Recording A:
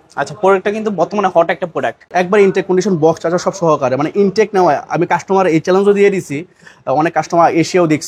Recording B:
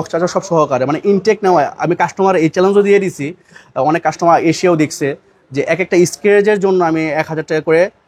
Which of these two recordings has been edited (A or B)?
A